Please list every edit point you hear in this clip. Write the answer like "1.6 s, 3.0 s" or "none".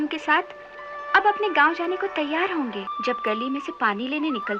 2.9 s